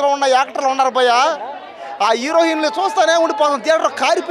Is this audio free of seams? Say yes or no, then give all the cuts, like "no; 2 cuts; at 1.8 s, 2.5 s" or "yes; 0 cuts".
yes; 0 cuts